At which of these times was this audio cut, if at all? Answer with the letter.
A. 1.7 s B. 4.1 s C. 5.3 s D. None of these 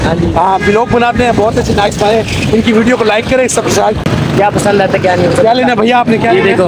B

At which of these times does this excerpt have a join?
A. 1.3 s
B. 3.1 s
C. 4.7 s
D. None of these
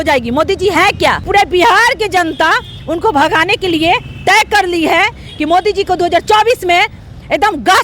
A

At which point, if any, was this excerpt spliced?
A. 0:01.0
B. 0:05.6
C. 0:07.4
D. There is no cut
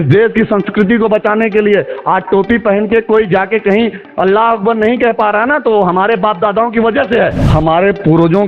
C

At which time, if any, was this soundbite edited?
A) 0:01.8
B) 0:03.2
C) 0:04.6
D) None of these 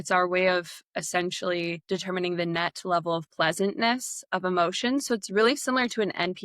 A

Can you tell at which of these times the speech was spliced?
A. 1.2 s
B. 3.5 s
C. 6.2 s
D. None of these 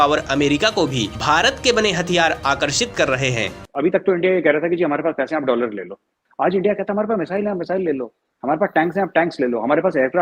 B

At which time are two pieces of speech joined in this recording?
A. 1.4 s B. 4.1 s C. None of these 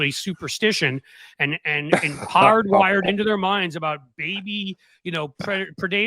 C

